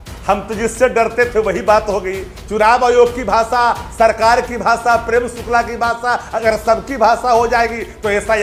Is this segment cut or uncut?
uncut